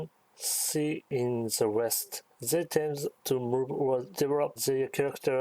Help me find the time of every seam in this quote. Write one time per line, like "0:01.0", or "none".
0:01.1
0:02.1
0:03.2
0:04.3